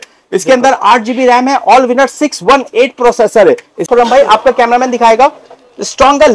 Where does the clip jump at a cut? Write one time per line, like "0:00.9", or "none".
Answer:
0:03.9